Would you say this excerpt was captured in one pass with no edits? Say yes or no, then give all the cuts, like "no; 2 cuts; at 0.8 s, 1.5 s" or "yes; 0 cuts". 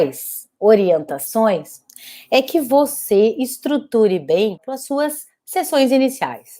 no; 1 cut; at 4.7 s